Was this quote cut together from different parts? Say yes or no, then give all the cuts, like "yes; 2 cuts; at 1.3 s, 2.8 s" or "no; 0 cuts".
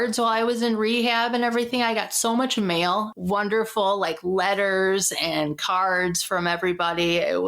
yes; 1 cut; at 3.1 s